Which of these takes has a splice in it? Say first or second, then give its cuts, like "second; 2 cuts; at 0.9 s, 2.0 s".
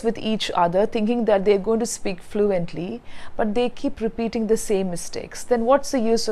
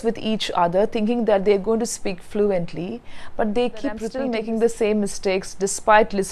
second; 1 cut; at 4.1 s